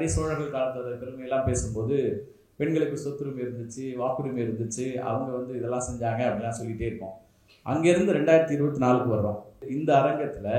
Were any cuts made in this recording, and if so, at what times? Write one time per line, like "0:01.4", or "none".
0:09.7